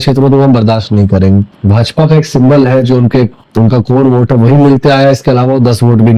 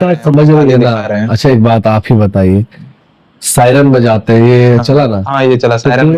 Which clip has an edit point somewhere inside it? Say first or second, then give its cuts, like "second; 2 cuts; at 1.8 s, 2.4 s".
first; 1 cut; at 1.5 s